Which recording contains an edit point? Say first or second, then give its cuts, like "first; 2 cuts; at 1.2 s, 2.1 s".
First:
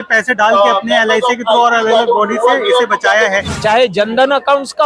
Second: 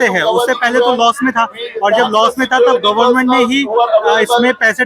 first; 1 cut; at 3.5 s